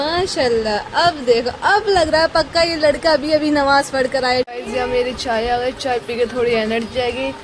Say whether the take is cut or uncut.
cut